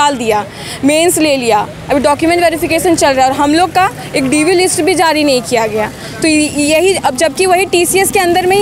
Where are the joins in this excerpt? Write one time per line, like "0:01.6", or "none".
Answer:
none